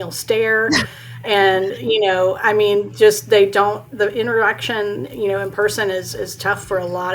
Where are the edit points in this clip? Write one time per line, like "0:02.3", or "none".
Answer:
0:04.0